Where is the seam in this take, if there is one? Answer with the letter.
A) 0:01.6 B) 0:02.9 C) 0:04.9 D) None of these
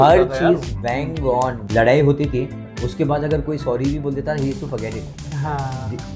A